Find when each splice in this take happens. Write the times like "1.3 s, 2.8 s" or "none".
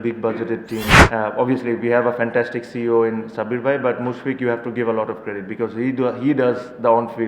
1.0 s

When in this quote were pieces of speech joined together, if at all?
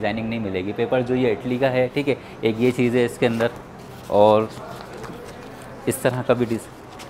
none

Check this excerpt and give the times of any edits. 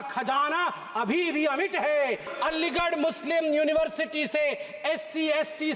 2.3 s

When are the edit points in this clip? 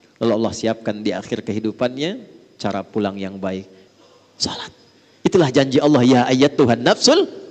3.8 s

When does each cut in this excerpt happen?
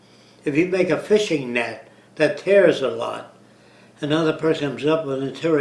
none

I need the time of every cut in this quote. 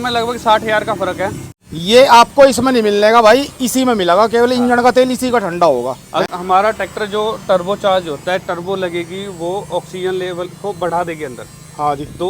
1.5 s, 6.2 s

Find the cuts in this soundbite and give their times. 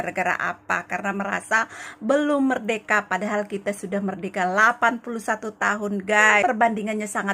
6.4 s

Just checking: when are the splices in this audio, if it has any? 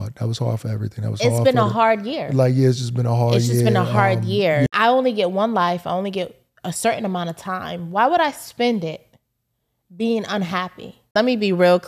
4.7 s, 11.1 s

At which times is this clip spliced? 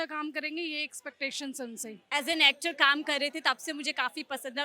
2.0 s

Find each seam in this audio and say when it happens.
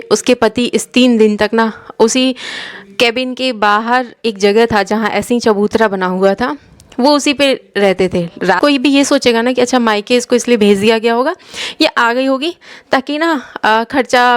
8.6 s

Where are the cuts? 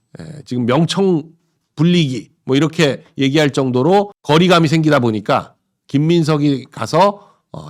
none

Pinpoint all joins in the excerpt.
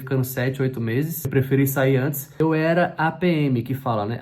2.4 s

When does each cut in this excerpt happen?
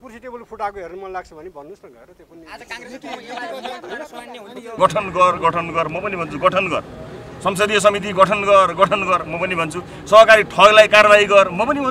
4.7 s

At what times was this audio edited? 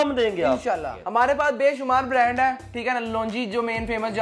0.9 s

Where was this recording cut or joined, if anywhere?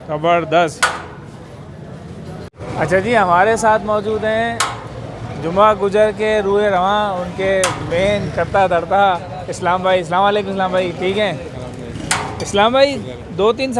none

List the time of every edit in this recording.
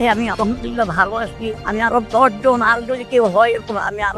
none

